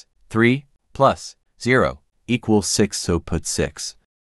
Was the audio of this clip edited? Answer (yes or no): no